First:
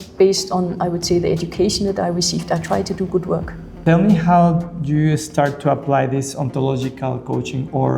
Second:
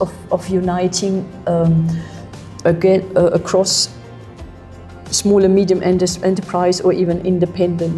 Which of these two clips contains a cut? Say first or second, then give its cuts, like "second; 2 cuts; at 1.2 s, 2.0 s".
first; 1 cut; at 3.8 s